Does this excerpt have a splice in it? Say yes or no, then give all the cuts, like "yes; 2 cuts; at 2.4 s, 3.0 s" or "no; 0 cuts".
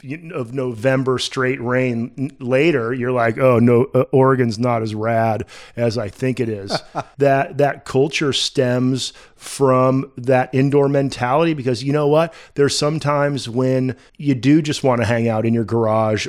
yes; 2 cuts; at 7.0 s, 14.1 s